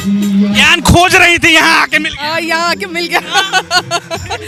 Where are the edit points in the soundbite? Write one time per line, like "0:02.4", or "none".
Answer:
none